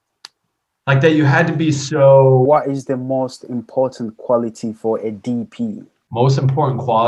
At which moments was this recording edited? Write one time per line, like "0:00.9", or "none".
0:02.5
0:05.9